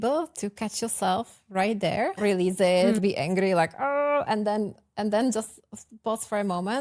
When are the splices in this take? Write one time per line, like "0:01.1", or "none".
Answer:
0:02.2

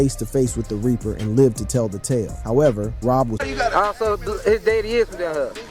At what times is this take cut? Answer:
0:03.4

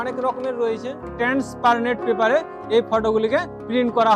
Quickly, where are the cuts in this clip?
0:01.0

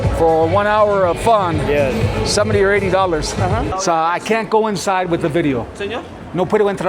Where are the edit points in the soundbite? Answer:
0:03.7

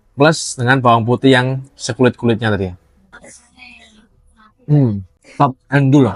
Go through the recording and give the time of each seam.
0:05.2

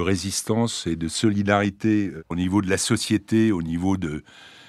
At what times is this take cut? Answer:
0:02.2

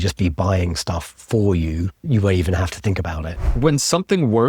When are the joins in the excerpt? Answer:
0:02.0
0:03.3

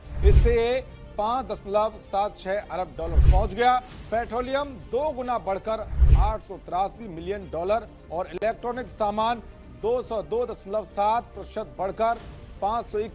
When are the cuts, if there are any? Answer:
none

